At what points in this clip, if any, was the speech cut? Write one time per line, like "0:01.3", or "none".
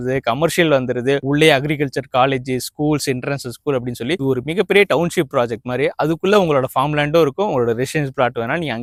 none